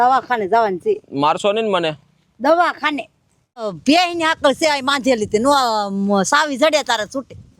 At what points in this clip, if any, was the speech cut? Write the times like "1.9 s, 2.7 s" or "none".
3.7 s